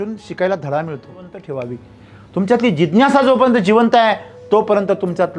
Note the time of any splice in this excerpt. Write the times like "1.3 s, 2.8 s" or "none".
1.4 s